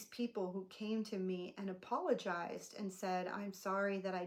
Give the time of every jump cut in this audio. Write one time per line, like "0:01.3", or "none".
none